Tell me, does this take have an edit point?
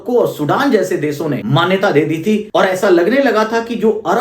yes; 2 cuts; at 1.4 s, 2.4 s

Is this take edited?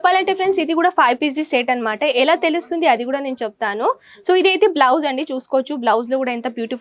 no; 0 cuts

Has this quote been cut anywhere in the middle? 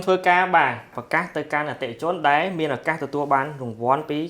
yes; 1 cut; at 0.9 s

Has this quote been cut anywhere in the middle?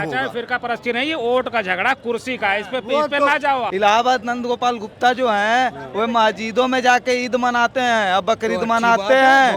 yes; 1 cut; at 3.7 s

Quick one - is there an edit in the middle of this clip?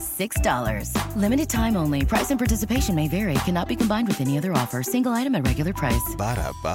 no; 0 cuts

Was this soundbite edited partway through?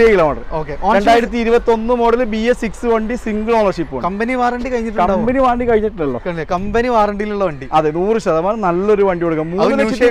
no; 0 cuts

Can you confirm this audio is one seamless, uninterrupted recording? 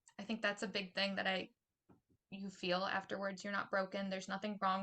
yes; 0 cuts

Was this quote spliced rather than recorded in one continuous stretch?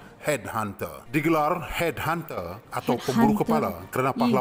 yes; 1 cut; at 0.9 s

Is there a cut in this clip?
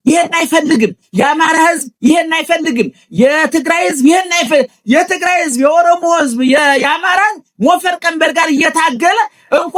no; 0 cuts

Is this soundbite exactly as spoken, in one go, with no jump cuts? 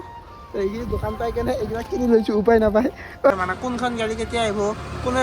no; 1 cut; at 3.3 s

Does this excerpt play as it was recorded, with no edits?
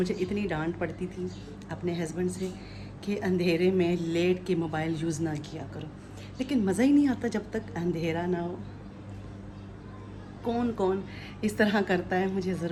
yes; 0 cuts

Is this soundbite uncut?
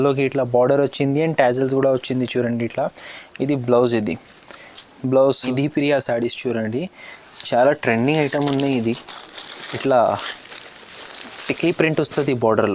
no; 1 cut; at 5.5 s

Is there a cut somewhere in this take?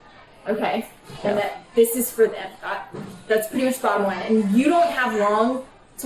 no; 0 cuts

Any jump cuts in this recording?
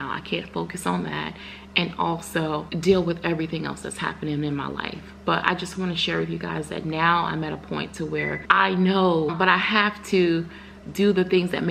yes; 3 cuts; at 2.7 s, 8.4 s, 9.3 s

